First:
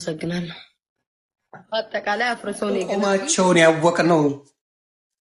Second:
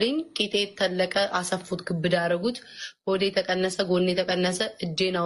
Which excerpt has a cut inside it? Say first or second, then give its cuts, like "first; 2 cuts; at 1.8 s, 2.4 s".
first; 1 cut; at 3.0 s